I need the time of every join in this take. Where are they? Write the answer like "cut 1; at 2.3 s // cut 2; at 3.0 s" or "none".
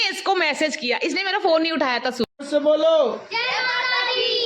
cut 1; at 2.3 s